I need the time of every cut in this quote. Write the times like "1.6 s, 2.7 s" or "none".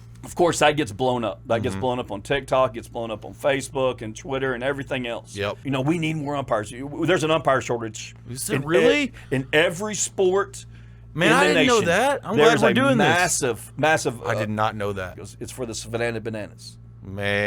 5.6 s, 15.1 s